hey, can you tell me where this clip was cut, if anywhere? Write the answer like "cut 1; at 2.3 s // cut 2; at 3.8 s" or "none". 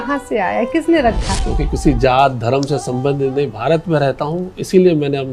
cut 1; at 1.4 s